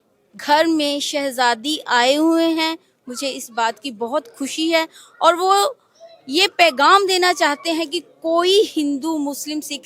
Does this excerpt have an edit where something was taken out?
no; 0 cuts

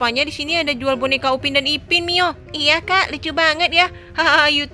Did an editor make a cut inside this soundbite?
no; 0 cuts

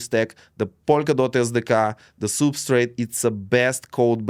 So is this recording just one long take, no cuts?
yes; 0 cuts

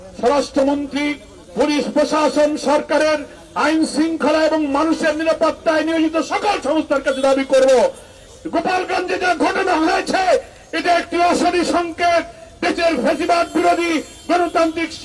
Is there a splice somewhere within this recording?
no; 0 cuts

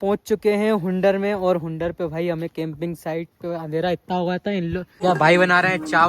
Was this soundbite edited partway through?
yes; 1 cut; at 5.0 s

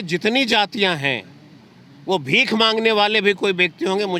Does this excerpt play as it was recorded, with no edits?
yes; 0 cuts

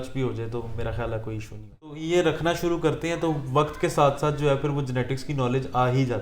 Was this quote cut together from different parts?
yes; 1 cut; at 1.9 s

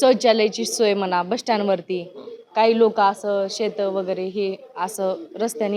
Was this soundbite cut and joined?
no; 0 cuts

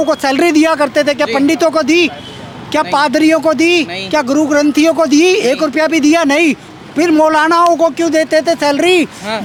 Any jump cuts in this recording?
no; 0 cuts

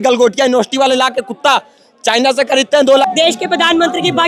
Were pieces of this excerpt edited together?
yes; 1 cut; at 3.0 s

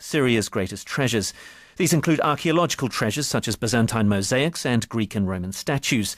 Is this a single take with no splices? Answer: no; 1 cut; at 2.4 s

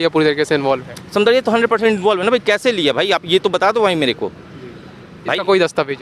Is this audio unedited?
yes; 0 cuts

